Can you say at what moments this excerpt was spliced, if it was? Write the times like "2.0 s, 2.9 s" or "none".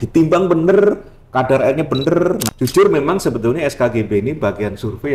2.5 s